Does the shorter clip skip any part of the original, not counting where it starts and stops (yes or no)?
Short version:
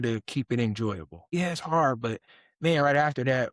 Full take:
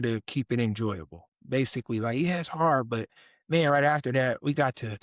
yes